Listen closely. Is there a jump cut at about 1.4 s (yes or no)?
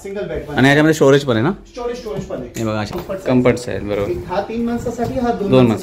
no